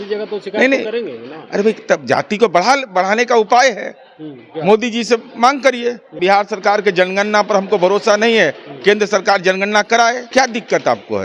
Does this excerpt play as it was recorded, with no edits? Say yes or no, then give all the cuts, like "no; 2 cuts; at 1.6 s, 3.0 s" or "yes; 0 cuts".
no; 2 cuts; at 6.1 s, 10.2 s